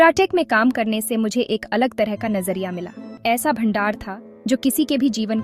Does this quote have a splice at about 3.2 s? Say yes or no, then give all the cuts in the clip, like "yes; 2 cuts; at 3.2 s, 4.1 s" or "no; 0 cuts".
yes; 1 cut; at 3.2 s